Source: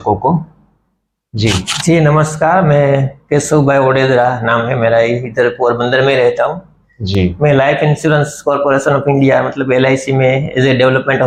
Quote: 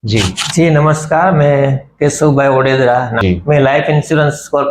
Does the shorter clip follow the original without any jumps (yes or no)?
no